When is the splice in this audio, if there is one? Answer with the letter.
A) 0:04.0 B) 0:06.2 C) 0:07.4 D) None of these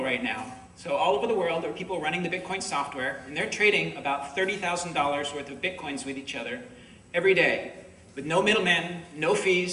A